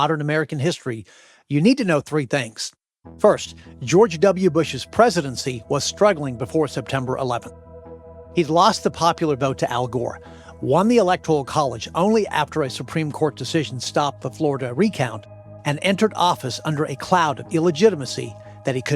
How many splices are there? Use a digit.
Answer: 0